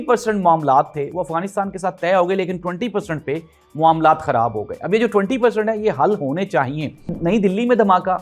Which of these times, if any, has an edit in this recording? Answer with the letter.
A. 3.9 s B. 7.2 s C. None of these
B